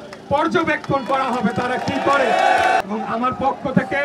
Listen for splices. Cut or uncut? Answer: cut